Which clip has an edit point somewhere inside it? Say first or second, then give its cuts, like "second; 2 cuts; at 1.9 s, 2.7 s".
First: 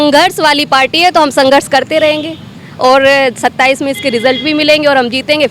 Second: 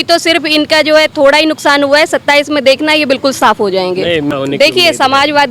second; 1 cut; at 4.3 s